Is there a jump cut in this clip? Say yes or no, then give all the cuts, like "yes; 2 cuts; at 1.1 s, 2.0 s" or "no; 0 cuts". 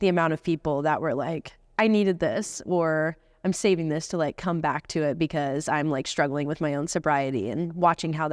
no; 0 cuts